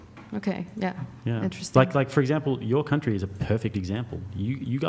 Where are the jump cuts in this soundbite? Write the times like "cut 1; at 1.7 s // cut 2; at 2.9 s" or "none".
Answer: none

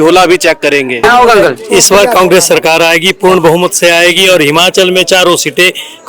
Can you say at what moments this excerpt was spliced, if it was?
cut 1; at 1.1 s

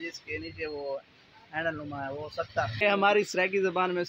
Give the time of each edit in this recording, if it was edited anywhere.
cut 1; at 2.8 s

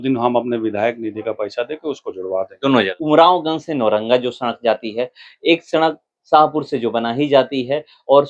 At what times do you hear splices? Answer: cut 1; at 3.0 s

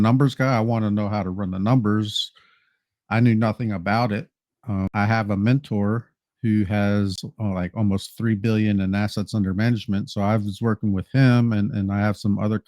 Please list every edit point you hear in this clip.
cut 1; at 4.9 s // cut 2; at 7.3 s

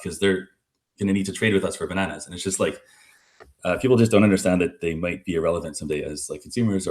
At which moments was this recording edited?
cut 1; at 4.8 s

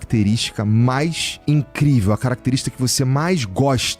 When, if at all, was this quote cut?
cut 1; at 1.3 s

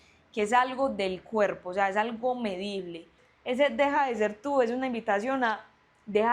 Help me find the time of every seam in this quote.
cut 1; at 3.3 s

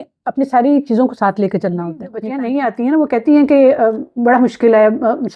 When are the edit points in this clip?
cut 1; at 2.2 s

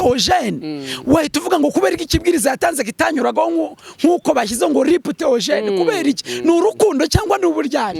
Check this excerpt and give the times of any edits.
none

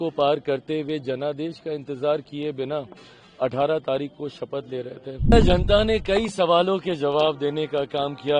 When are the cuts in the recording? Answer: cut 1; at 5.3 s

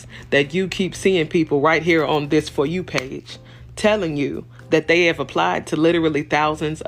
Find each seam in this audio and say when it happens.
none

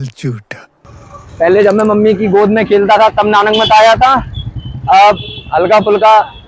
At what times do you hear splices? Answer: none

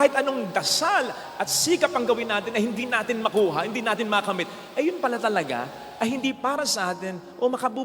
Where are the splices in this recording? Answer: none

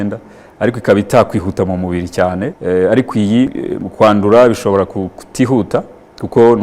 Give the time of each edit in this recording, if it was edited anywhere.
cut 1; at 2.6 s // cut 2; at 3.6 s

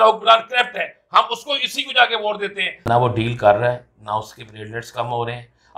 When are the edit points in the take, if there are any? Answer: cut 1; at 2.8 s

